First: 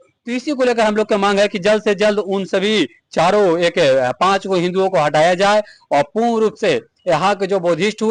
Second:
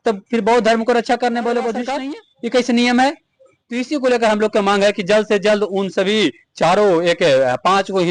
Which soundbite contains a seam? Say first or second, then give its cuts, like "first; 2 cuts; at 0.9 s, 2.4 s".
second; 1 cut; at 2.0 s